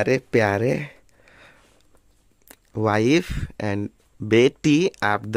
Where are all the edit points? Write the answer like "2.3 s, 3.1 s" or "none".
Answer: none